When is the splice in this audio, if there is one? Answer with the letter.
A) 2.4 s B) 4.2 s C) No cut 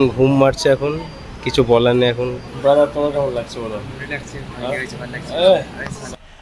A